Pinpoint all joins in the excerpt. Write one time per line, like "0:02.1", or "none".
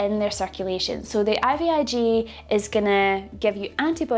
none